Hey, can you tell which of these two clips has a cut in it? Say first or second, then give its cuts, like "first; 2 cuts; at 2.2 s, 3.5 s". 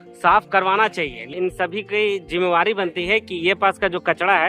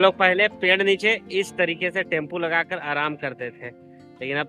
first; 1 cut; at 1.3 s